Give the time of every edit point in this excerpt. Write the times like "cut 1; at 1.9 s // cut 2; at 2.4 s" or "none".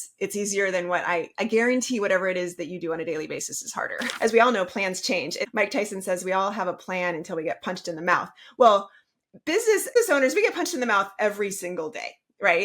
cut 1; at 4.1 s // cut 2; at 5.4 s // cut 3; at 10.0 s